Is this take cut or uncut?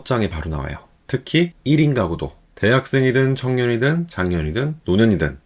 cut